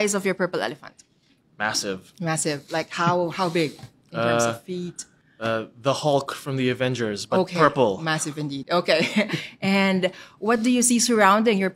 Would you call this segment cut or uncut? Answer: cut